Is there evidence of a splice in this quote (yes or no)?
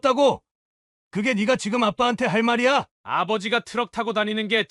no